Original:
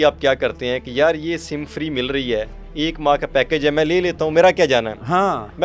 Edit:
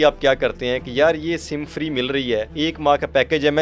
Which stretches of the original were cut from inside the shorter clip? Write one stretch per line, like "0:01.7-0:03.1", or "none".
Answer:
0:02.5-0:02.7